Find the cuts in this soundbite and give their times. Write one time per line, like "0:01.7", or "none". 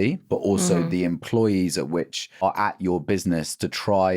0:02.4

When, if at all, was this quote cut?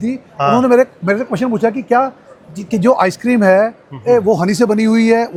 none

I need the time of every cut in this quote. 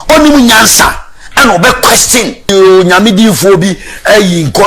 0:02.5

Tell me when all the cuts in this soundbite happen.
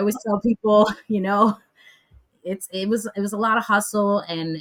none

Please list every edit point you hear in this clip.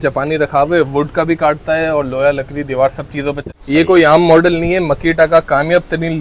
0:03.4

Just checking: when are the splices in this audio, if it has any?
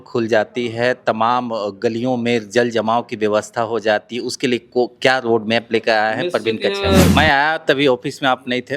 0:07.1

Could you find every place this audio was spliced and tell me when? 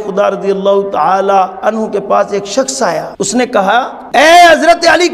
0:03.1
0:04.0

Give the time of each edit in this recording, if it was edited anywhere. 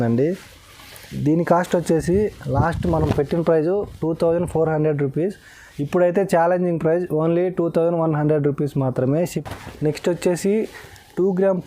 0:09.3

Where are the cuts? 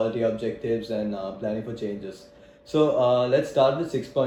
none

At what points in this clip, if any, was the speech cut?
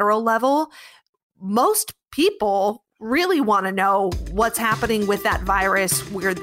none

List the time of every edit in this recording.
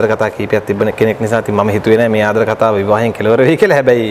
none

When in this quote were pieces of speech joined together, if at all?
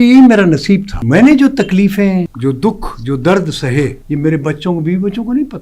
0:00.9
0:02.3
0:04.0

